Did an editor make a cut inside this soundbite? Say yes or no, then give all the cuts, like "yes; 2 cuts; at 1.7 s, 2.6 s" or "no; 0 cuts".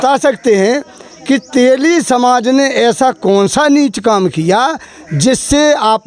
no; 0 cuts